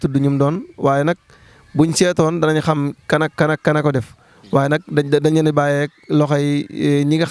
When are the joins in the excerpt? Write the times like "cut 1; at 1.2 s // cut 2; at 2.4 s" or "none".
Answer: none